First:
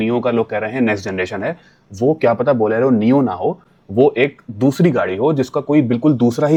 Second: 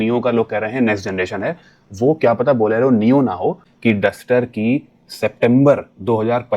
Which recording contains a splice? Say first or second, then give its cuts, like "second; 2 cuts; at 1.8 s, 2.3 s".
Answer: second; 1 cut; at 3.7 s